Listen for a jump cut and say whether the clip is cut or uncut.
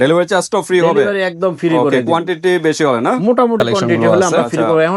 uncut